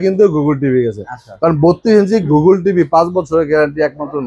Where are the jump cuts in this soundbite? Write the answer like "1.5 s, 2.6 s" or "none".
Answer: none